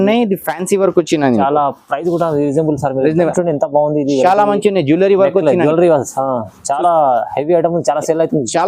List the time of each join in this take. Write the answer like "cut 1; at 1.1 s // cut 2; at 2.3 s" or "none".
cut 1; at 3.3 s